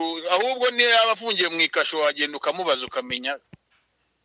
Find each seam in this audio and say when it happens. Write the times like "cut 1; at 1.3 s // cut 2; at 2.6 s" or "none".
none